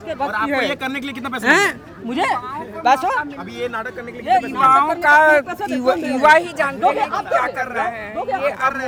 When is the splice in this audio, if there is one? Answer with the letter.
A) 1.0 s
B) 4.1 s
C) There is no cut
C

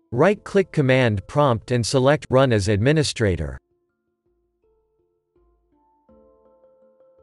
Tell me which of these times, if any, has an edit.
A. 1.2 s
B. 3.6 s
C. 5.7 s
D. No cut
B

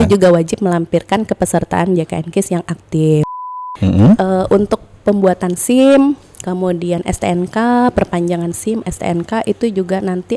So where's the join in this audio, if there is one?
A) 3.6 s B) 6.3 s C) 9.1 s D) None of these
A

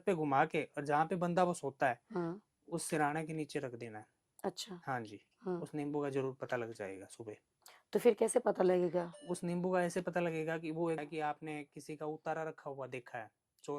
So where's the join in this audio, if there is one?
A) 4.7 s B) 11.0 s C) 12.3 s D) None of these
B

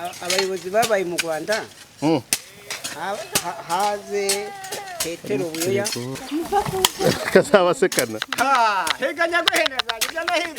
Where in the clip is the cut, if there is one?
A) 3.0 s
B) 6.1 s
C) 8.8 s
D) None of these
B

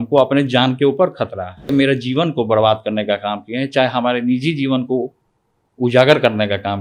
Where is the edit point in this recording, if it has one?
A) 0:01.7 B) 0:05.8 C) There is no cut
A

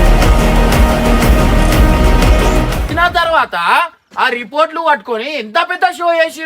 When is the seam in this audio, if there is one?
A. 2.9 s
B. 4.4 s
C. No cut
A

